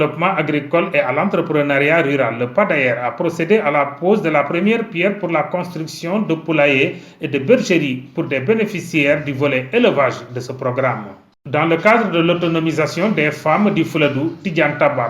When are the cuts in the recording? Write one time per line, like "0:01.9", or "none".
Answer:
0:11.2